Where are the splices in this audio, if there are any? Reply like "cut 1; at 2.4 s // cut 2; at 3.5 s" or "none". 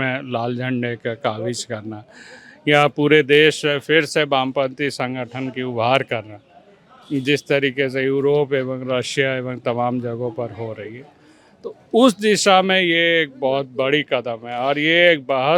none